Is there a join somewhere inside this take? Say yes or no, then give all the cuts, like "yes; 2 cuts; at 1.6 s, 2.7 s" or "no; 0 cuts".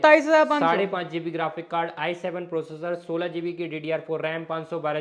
no; 0 cuts